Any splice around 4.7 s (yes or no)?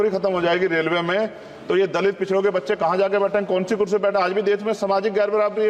no